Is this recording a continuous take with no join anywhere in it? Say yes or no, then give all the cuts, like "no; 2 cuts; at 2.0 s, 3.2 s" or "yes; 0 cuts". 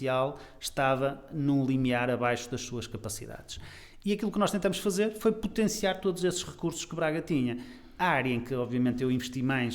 yes; 0 cuts